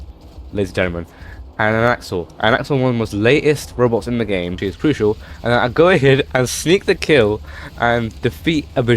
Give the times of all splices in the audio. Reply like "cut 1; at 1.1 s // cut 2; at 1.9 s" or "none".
cut 1; at 4.6 s